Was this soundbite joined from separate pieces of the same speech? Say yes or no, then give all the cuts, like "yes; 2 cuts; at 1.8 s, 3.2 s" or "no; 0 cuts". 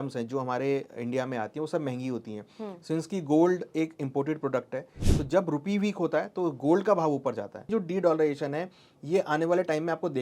yes; 1 cut; at 7.7 s